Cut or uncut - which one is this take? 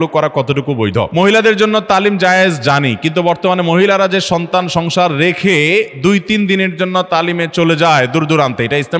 cut